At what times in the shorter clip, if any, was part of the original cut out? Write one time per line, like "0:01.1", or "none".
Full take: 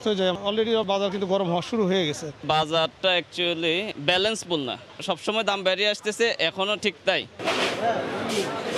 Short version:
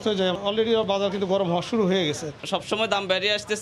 0:02.3